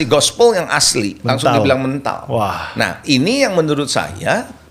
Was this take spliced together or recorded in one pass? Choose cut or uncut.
uncut